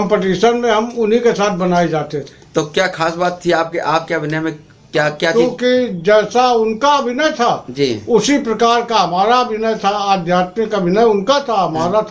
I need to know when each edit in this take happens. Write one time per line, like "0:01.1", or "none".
none